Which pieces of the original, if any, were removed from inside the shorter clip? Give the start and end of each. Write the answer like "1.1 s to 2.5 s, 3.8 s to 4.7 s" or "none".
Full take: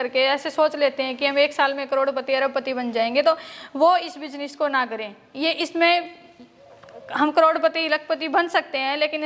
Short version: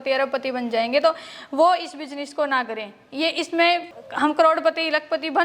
6.2 s to 7.0 s